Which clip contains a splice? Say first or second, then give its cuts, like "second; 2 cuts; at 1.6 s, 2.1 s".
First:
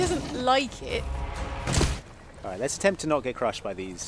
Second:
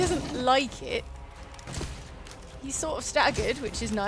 first; 1 cut; at 2.0 s